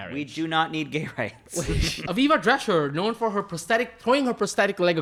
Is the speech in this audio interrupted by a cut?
no; 0 cuts

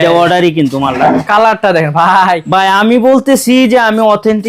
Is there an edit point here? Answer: yes; 1 cut; at 1.2 s

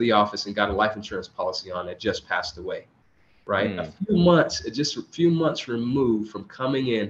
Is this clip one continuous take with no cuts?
yes; 0 cuts

